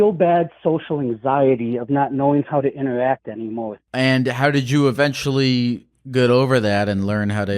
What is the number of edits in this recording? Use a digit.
1